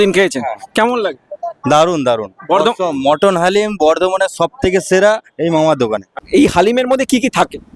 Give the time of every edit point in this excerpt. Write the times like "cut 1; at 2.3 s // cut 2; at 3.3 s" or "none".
cut 1; at 6.1 s